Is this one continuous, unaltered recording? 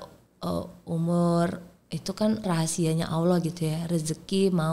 no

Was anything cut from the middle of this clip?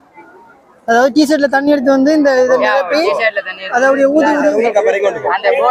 no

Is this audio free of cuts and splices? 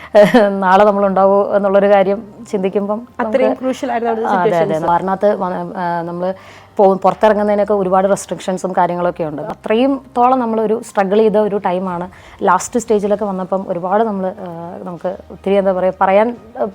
no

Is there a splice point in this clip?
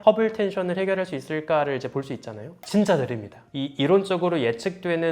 no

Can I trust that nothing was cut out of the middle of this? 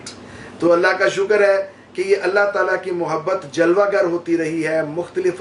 yes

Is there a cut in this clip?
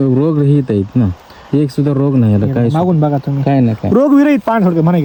no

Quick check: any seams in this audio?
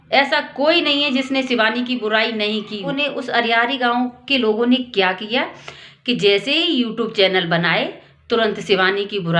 yes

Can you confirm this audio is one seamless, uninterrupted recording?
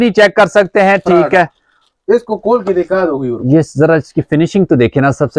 yes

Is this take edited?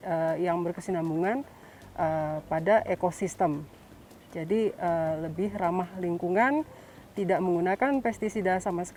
no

